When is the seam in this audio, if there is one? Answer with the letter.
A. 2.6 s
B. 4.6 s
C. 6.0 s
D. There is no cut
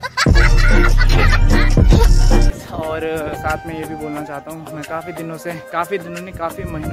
A